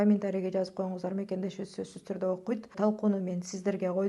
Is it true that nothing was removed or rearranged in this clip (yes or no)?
no